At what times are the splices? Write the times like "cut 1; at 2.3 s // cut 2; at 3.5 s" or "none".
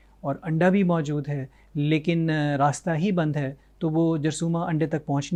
none